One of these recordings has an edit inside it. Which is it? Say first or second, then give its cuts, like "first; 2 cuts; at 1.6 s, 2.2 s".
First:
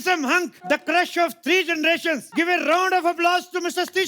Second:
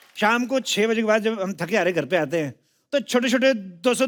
first; 2 cuts; at 0.7 s, 2.3 s